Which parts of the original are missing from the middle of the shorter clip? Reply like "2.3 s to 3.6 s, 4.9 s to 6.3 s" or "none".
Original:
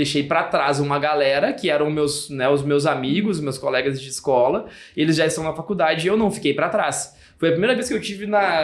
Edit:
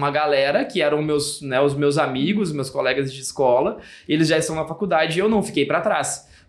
none